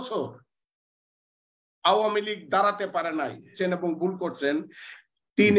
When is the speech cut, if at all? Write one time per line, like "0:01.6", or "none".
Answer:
0:03.5